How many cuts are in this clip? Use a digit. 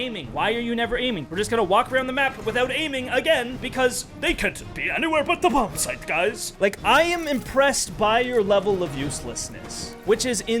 3